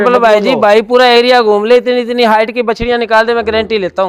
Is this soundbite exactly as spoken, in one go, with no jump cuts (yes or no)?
yes